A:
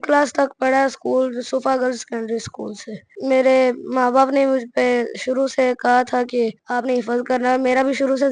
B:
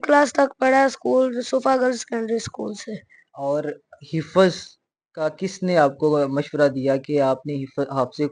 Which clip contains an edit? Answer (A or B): A